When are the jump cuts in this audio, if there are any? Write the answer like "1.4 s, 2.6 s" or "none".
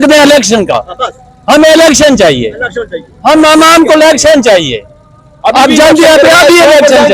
none